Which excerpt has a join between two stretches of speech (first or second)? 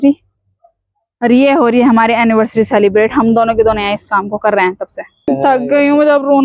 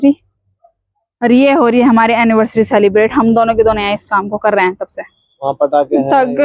first